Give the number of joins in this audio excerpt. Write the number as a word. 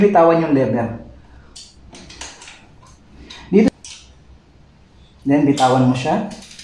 one